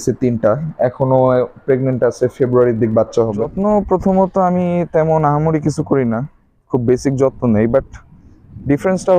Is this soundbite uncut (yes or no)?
no